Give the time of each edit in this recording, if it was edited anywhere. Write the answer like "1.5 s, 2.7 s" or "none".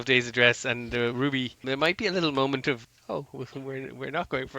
1.6 s, 2.8 s